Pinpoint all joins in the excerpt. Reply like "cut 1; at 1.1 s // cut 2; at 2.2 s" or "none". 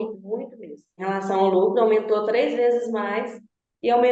cut 1; at 1.0 s